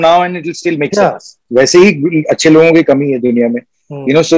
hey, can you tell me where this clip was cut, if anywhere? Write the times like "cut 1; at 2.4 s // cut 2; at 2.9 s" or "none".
cut 1; at 1.3 s